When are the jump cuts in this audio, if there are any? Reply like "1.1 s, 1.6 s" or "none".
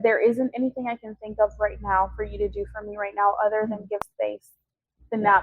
4.1 s